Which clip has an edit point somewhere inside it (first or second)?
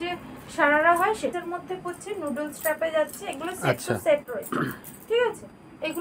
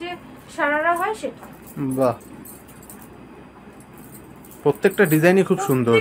first